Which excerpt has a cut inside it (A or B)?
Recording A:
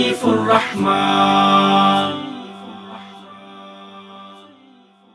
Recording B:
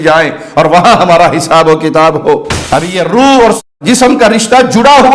B